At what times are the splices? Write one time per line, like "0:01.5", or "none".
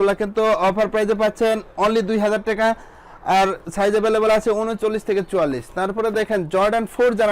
none

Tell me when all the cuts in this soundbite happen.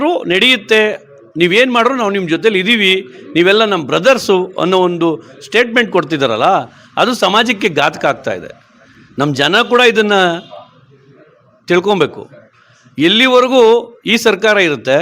none

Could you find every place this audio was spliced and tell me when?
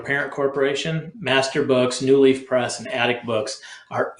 0:01.1

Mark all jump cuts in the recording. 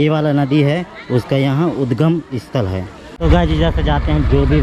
0:03.2

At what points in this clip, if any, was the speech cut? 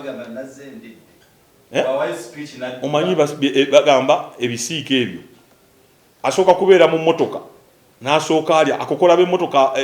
none

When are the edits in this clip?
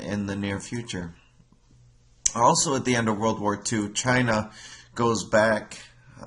none

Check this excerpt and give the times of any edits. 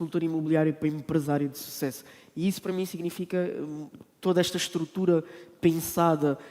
none

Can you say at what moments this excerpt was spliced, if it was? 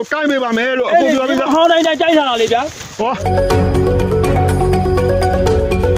0:03.2

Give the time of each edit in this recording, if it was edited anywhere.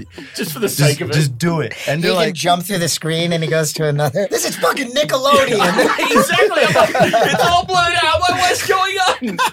0:04.3

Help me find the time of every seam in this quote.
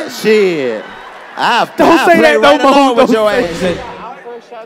0:03.5

